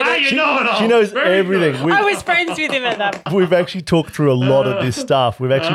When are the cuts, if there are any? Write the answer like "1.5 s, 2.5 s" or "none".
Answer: 3.3 s